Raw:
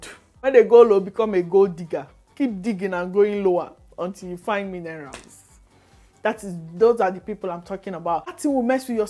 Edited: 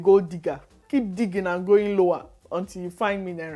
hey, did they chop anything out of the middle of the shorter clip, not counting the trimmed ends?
no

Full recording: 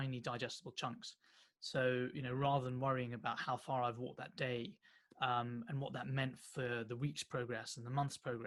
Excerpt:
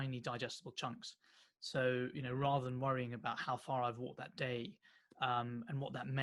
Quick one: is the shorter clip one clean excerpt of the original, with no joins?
yes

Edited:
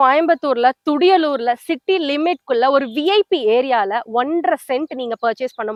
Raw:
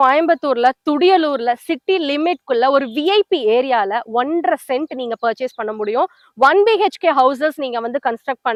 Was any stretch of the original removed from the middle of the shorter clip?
no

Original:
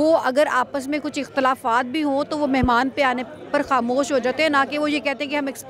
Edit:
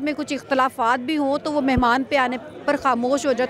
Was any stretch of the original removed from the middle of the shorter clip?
no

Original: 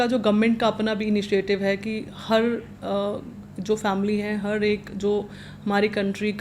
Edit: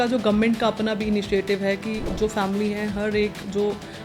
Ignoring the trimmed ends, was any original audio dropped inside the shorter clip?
yes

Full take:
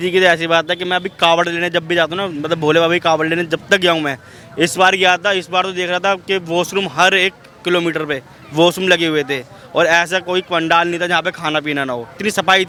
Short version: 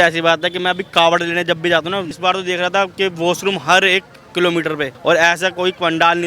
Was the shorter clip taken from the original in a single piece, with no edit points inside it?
no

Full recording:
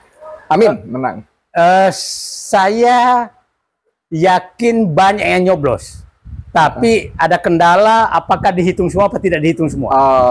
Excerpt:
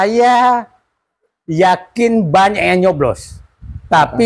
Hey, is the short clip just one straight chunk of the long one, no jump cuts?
yes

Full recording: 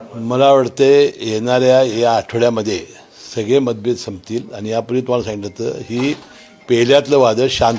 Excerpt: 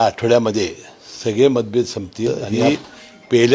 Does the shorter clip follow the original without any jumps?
no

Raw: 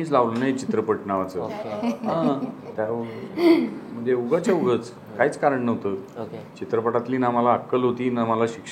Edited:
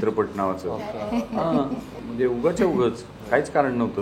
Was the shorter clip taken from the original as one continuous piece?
no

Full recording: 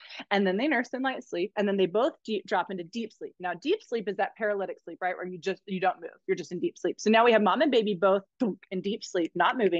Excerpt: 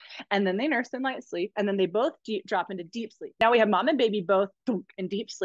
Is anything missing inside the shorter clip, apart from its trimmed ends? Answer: yes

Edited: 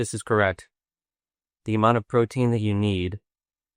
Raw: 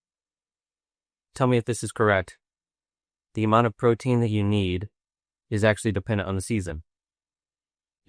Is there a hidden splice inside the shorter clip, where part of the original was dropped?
no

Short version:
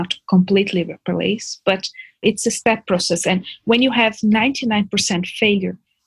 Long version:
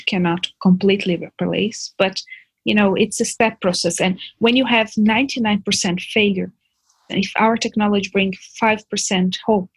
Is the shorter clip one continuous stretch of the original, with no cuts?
no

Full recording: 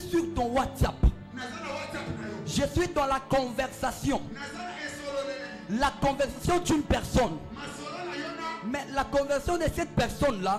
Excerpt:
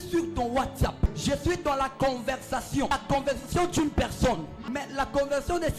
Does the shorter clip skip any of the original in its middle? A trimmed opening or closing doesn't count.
yes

